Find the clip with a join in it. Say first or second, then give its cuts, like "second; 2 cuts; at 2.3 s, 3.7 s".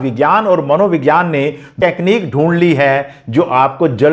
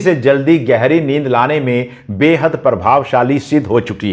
first; 1 cut; at 1.7 s